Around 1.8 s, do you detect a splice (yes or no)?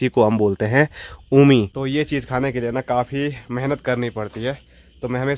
yes